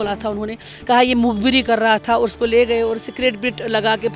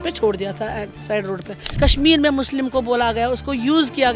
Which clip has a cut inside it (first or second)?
second